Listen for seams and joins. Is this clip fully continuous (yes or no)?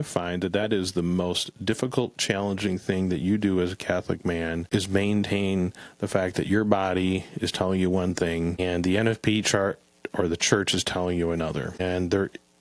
no